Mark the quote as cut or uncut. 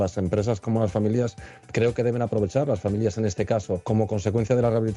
cut